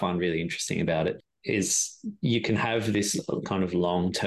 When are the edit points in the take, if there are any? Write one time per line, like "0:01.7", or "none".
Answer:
none